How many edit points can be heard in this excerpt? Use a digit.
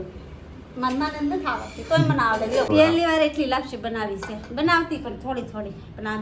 1